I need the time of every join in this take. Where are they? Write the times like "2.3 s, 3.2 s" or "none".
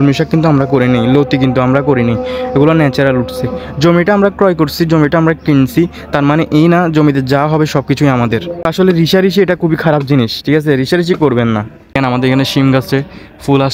8.6 s, 12.0 s